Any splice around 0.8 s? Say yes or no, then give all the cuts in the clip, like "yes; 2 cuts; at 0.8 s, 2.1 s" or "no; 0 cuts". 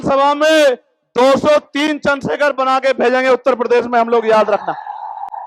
no; 0 cuts